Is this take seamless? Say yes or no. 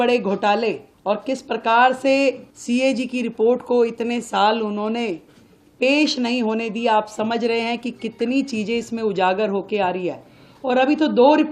no